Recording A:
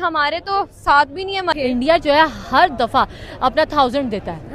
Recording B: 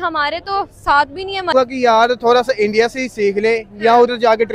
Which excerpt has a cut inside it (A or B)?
B